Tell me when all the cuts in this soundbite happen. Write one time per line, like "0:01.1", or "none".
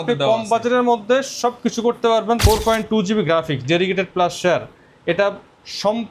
0:02.4